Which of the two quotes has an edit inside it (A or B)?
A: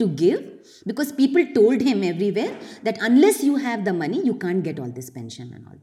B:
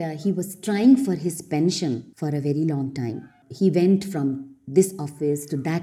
B